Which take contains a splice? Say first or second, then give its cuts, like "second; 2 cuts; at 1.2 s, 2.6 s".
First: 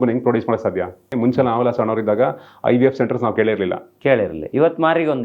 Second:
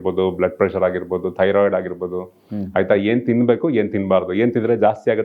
first; 1 cut; at 1.1 s